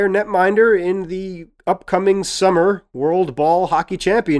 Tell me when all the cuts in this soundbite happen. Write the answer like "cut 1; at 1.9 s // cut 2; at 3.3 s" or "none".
none

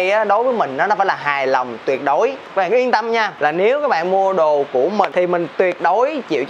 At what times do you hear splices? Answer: cut 1; at 2.4 s // cut 2; at 3.3 s // cut 3; at 5.1 s

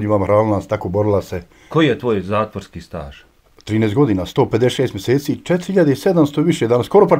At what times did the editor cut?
cut 1; at 1.6 s

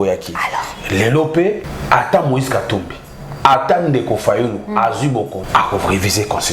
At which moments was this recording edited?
cut 1; at 1.7 s // cut 2; at 5.4 s

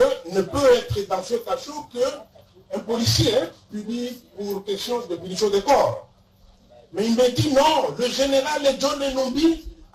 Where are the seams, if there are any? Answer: none

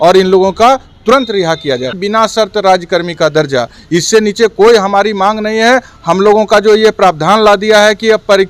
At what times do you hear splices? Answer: cut 1; at 1.9 s

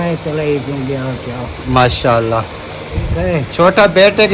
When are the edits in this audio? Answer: cut 1; at 3.1 s

